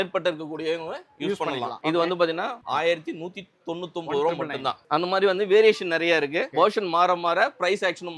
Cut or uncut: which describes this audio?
uncut